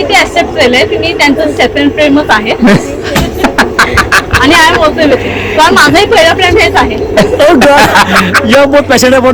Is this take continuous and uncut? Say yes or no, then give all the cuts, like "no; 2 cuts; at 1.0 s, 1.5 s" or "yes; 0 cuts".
yes; 0 cuts